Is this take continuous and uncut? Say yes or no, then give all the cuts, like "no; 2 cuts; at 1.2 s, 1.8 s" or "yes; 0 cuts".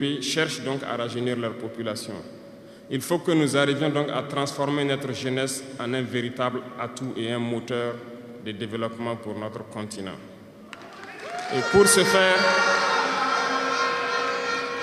yes; 0 cuts